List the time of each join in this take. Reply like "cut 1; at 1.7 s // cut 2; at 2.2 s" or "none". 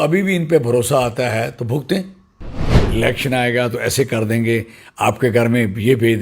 cut 1; at 2.8 s